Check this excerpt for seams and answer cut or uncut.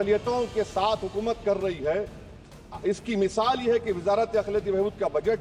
uncut